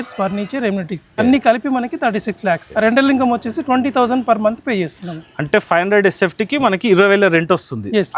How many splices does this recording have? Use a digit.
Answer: 1